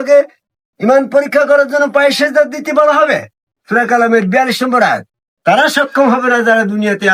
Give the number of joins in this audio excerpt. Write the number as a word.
zero